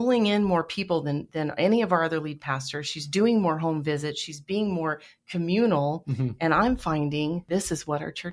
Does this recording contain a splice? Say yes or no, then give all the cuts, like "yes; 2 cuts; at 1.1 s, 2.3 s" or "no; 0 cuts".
yes; 1 cut; at 7.4 s